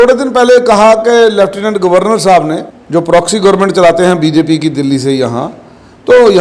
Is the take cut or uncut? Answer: cut